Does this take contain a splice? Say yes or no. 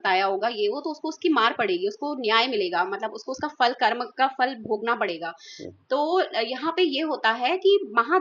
no